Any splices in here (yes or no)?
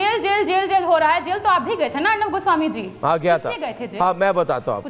yes